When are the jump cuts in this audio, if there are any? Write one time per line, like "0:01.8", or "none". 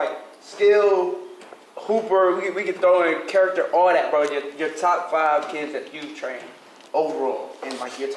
none